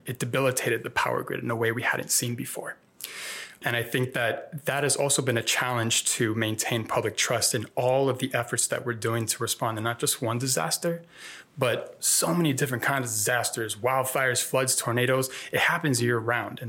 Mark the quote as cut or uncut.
uncut